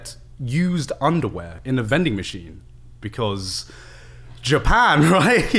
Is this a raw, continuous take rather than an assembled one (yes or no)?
no